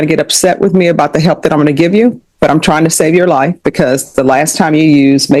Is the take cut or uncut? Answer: uncut